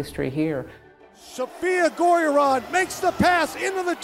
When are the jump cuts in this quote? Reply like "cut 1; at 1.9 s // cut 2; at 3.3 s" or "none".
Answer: cut 1; at 1.1 s

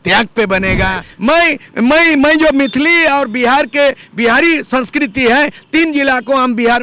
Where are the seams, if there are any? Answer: cut 1; at 1.1 s

